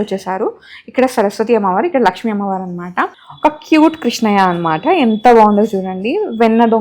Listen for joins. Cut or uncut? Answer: cut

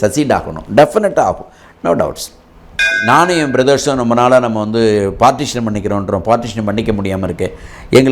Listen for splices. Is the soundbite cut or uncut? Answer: cut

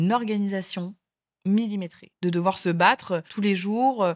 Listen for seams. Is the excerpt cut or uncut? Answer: cut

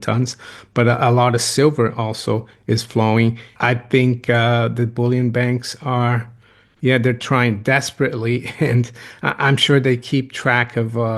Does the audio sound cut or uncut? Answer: cut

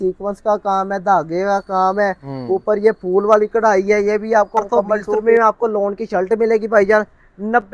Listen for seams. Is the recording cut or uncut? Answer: cut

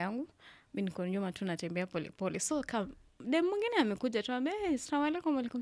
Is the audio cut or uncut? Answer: uncut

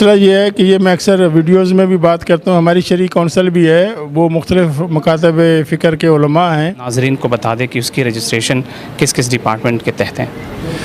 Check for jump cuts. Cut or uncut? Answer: cut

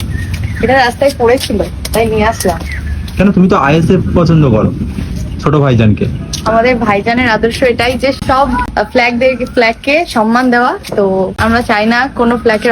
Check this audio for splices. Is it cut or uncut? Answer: cut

